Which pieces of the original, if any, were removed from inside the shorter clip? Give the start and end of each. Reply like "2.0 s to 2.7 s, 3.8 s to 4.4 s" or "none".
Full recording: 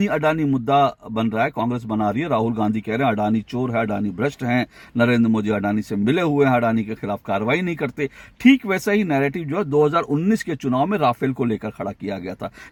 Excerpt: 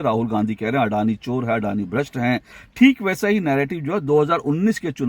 4.8 s to 8.2 s